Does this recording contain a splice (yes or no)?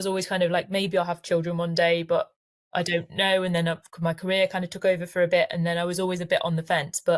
no